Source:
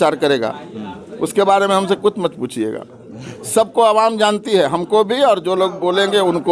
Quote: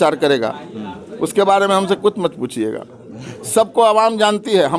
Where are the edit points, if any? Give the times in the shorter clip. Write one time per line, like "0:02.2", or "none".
none